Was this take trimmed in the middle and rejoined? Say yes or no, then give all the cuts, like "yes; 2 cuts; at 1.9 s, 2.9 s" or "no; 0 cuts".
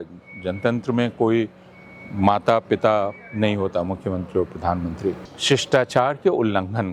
yes; 1 cut; at 5.3 s